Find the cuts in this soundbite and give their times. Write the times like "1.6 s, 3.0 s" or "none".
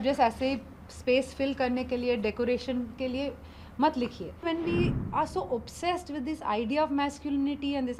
4.4 s

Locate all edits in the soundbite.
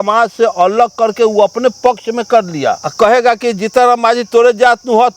none

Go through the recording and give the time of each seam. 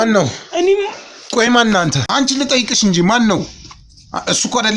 2.0 s

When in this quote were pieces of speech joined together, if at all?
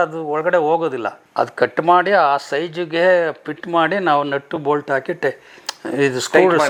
none

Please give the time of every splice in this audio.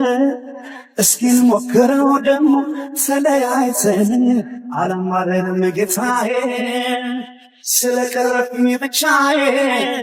none

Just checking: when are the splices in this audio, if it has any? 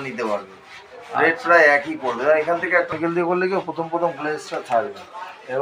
2.9 s

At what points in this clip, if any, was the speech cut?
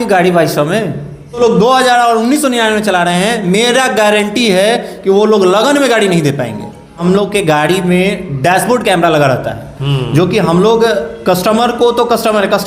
1.4 s, 7.0 s

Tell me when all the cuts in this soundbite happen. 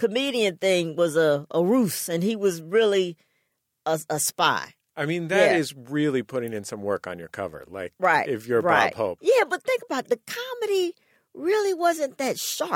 9.2 s

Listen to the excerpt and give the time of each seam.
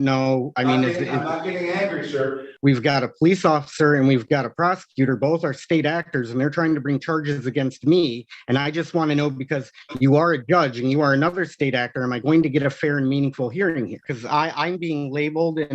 2.5 s, 14.1 s

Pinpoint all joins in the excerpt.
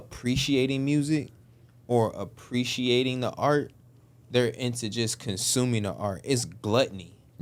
none

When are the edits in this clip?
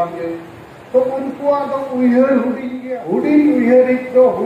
2.7 s

